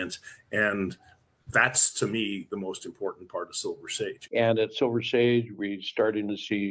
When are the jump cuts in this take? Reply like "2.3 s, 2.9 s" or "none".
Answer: 4.2 s